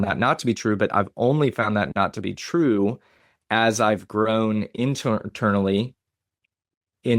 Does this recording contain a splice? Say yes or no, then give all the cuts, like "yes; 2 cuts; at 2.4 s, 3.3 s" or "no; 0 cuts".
no; 0 cuts